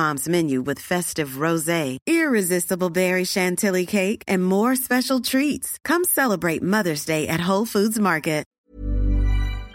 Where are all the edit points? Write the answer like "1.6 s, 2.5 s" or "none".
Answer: 8.5 s